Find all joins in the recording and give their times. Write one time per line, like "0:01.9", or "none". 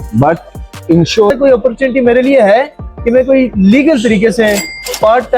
0:01.3